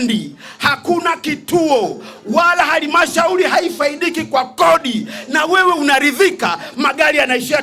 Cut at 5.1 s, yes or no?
no